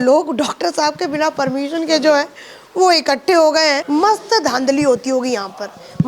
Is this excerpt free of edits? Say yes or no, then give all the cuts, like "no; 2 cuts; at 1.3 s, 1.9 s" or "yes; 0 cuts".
no; 1 cut; at 3.8 s